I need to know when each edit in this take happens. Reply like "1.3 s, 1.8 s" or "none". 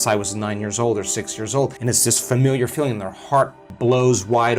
1.8 s, 3.6 s